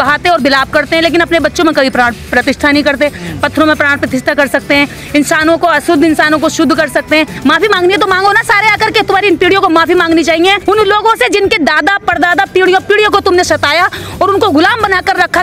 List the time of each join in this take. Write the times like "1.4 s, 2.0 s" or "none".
7.3 s, 10.6 s